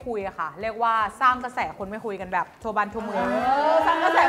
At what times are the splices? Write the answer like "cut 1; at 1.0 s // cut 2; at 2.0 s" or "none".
none